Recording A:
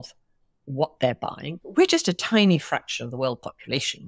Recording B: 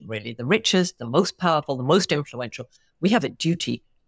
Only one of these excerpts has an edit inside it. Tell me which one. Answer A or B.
A